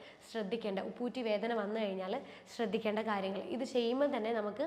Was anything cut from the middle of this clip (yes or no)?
no